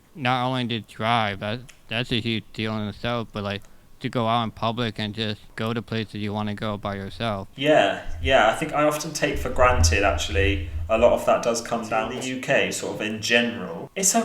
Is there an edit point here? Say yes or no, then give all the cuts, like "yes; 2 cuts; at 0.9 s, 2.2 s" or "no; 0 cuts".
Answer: yes; 1 cut; at 12.2 s